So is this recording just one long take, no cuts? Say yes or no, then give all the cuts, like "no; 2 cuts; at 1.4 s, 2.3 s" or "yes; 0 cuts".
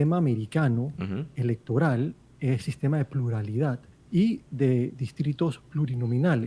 no; 1 cut; at 3.9 s